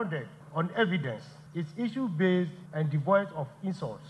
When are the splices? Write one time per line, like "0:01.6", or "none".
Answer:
0:02.6